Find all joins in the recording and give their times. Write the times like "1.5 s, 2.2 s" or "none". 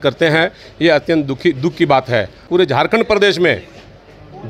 2.4 s